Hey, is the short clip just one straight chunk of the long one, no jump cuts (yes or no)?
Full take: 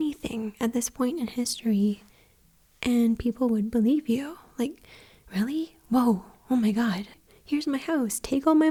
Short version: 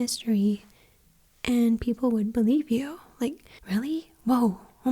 no